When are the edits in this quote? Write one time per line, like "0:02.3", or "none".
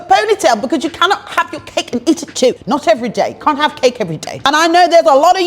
0:02.6
0:04.4